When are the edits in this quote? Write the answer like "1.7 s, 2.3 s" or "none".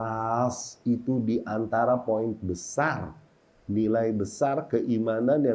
none